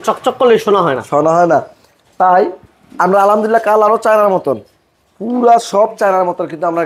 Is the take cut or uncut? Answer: uncut